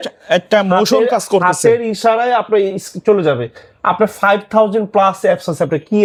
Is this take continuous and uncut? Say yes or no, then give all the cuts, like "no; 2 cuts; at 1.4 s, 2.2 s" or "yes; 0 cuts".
yes; 0 cuts